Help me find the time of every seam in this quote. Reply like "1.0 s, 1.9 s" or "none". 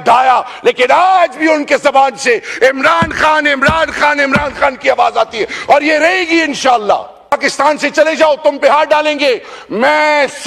7.3 s